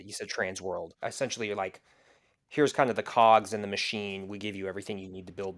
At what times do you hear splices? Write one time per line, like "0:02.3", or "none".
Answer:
0:01.0